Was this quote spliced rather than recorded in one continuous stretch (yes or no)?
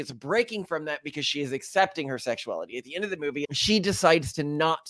yes